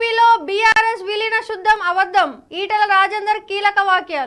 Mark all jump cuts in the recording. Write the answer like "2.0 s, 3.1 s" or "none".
none